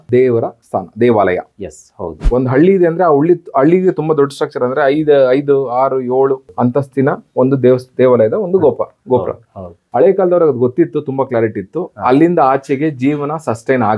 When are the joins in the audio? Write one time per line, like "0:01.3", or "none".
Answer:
0:02.2

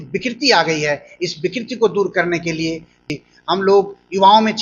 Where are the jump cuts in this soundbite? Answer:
0:03.1

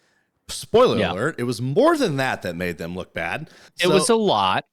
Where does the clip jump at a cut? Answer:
0:03.6

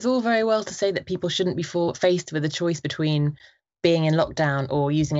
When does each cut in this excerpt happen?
none

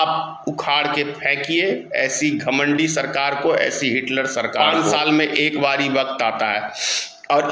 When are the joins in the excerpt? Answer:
0:04.5

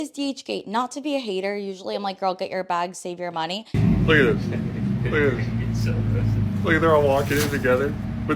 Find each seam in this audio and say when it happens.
0:03.6

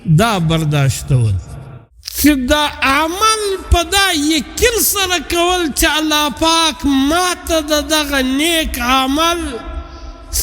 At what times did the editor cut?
0:01.7

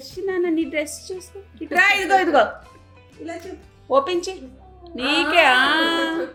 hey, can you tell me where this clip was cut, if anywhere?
none

